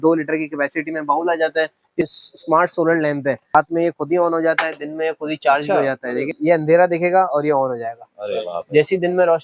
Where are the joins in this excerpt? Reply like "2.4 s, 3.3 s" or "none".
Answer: 2.1 s, 3.5 s, 6.3 s